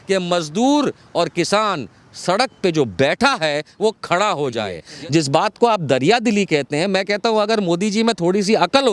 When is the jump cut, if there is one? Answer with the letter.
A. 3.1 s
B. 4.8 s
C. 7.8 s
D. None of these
B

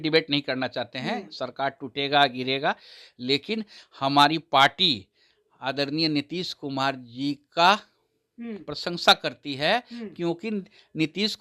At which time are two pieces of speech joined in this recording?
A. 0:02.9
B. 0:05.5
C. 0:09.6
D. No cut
D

